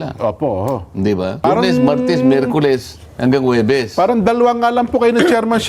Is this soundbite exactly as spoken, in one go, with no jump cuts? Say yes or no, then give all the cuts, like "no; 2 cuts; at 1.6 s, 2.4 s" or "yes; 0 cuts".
no; 1 cut; at 1.4 s